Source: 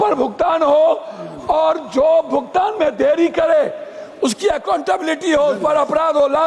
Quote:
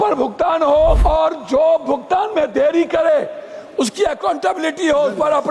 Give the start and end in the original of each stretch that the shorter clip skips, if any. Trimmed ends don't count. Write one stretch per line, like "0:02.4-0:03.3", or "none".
0:01.0-0:01.4